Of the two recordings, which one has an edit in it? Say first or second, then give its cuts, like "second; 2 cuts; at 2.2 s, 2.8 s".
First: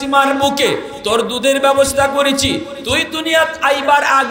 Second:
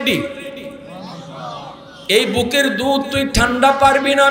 second; 2 cuts; at 0.9 s, 1.9 s